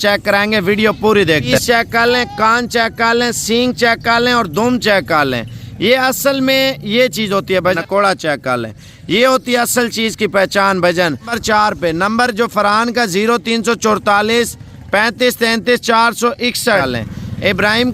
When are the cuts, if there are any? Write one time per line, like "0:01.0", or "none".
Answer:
0:01.5
0:07.8
0:11.4
0:16.8